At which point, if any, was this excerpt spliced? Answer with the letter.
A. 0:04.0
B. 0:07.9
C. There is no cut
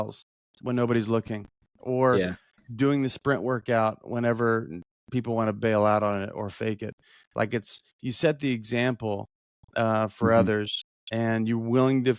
C